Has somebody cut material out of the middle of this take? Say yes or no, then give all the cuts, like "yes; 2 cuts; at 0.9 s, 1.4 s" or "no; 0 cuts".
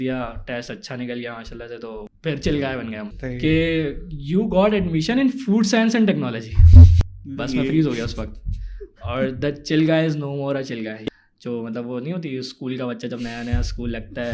yes; 4 cuts; at 2.1 s, 3.1 s, 7.0 s, 11.0 s